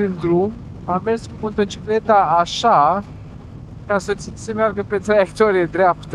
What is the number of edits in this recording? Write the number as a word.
zero